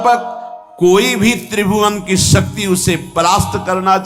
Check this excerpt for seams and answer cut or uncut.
uncut